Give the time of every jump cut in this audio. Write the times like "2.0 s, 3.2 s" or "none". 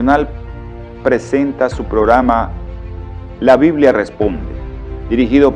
1.3 s